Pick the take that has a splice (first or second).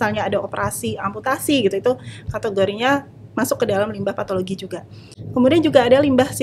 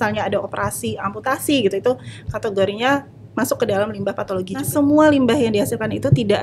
second